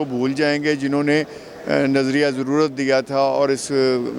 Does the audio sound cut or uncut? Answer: uncut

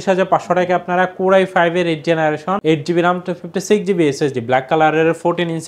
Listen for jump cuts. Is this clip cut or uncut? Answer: cut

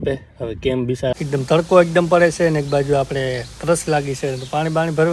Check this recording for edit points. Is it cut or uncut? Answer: cut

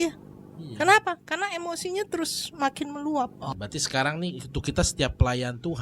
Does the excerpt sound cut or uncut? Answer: cut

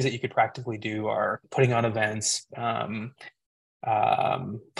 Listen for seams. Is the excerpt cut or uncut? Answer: uncut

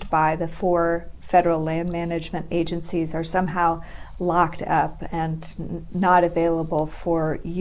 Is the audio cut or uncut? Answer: uncut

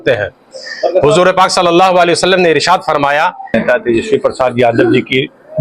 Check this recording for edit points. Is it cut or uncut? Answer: cut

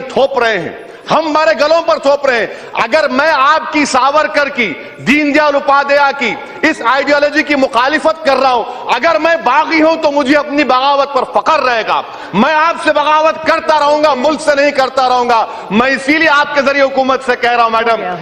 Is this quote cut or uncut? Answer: uncut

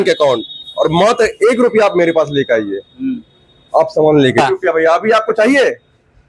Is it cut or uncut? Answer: cut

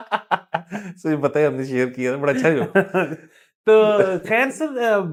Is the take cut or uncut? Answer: uncut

